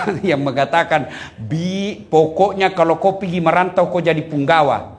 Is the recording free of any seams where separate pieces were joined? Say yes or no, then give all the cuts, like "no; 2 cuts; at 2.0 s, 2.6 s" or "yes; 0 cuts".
yes; 0 cuts